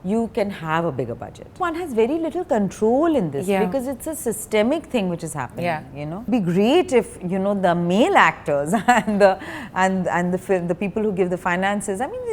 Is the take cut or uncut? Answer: cut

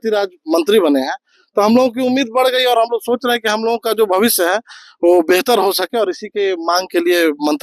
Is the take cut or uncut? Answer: uncut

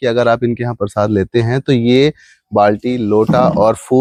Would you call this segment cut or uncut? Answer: uncut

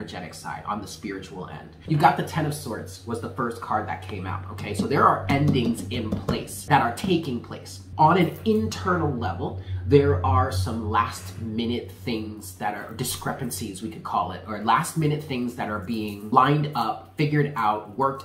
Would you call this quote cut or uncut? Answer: cut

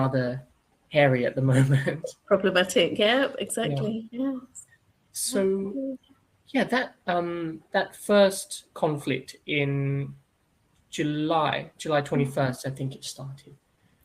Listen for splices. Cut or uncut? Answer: uncut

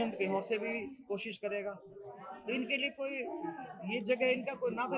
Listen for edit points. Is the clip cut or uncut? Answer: uncut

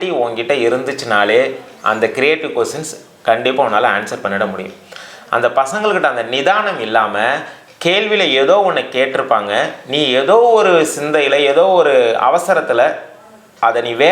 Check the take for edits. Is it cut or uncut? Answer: uncut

